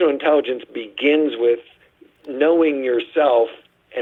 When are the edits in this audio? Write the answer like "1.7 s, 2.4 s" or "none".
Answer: none